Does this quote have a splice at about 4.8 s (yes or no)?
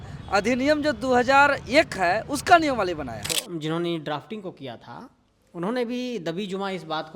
no